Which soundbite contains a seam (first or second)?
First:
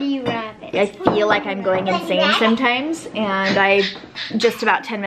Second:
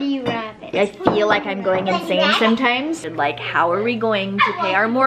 second